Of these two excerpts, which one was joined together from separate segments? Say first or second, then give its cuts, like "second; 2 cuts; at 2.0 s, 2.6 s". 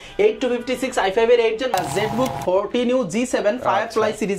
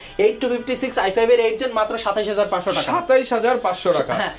first; 1 cut; at 1.7 s